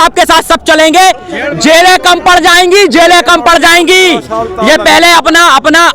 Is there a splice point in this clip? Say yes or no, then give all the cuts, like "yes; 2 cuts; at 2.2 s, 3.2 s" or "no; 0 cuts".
no; 0 cuts